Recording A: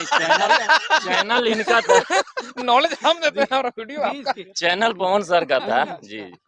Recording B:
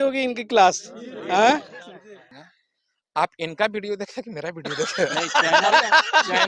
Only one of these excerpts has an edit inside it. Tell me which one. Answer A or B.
B